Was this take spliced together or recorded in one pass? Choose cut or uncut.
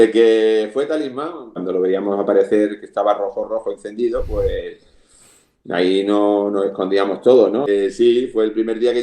cut